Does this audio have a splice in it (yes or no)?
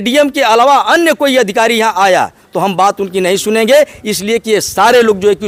no